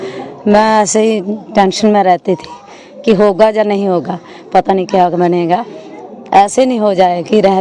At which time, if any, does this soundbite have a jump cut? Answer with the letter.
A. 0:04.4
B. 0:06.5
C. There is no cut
C